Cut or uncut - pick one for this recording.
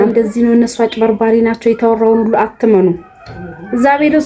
uncut